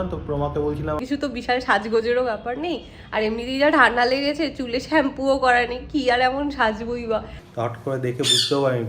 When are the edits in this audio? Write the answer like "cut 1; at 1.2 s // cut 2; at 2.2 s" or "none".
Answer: cut 1; at 1.0 s // cut 2; at 7.4 s